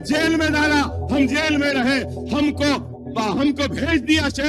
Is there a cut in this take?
no; 0 cuts

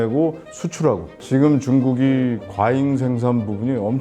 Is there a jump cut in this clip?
no; 0 cuts

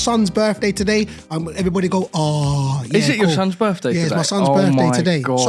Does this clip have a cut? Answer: no; 0 cuts

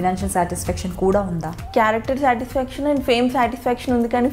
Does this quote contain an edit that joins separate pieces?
yes; 1 cut; at 1.5 s

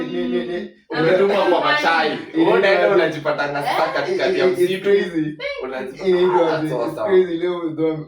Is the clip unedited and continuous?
yes; 0 cuts

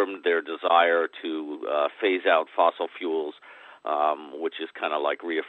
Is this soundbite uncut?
yes; 0 cuts

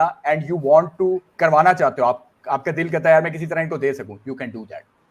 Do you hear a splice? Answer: yes; 1 cut; at 1.3 s

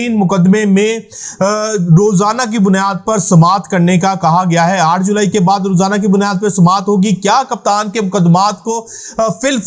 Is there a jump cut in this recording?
no; 0 cuts

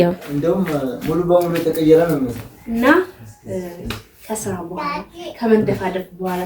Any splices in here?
yes; 1 cut; at 2.5 s

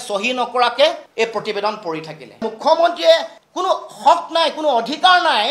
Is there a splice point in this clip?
yes; 1 cut; at 2.4 s

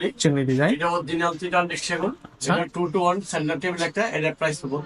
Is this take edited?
no; 0 cuts

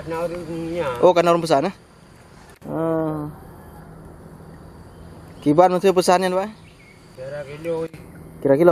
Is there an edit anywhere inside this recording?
no; 0 cuts

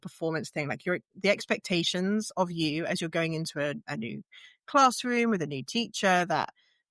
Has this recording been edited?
no; 0 cuts

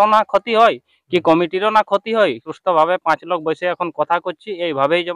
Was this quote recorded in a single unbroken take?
no; 1 cut; at 2.5 s

